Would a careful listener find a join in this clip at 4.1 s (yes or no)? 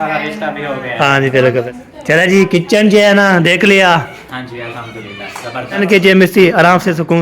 no